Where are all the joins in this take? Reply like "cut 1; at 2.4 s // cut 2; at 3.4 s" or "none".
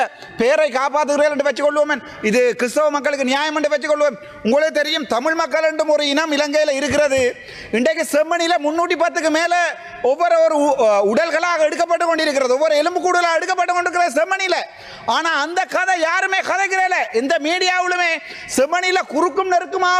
none